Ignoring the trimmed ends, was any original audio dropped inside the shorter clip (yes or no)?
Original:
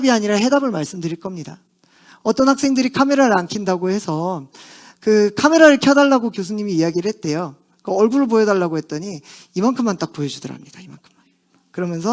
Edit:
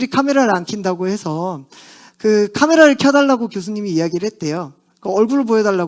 no